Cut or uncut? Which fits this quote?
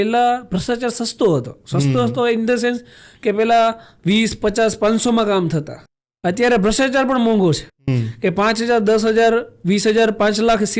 uncut